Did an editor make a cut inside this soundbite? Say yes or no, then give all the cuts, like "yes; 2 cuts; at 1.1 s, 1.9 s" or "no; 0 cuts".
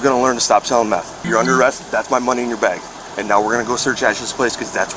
yes; 1 cut; at 1.1 s